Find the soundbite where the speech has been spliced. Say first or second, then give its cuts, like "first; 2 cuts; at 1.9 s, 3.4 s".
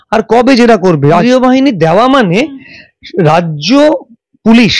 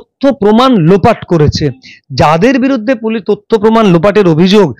first; 1 cut; at 1.2 s